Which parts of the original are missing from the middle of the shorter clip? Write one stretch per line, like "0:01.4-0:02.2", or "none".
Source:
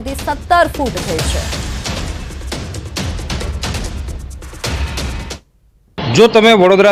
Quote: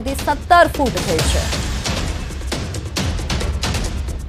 none